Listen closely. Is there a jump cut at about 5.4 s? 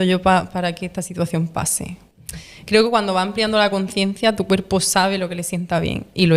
no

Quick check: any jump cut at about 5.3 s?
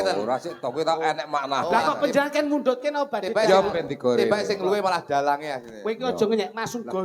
no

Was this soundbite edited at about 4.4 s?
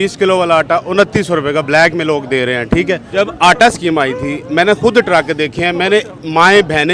no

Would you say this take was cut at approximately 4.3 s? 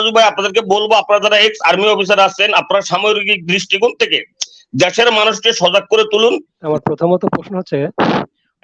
no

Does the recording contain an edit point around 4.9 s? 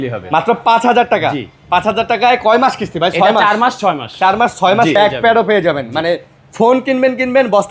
yes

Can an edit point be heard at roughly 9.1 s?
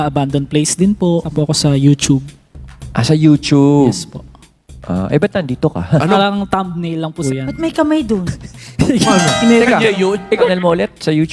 yes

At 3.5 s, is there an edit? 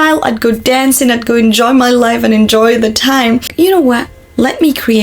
yes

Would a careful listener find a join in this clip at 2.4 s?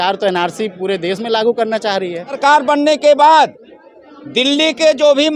yes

